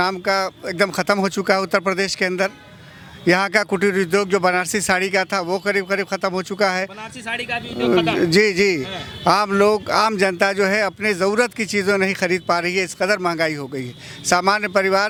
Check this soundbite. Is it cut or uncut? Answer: uncut